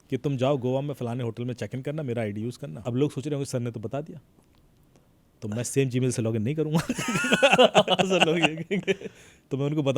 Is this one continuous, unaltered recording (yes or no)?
no